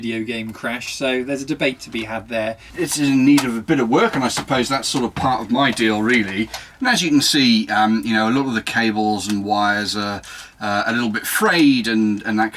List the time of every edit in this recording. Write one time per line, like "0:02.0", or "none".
0:02.7
0:06.6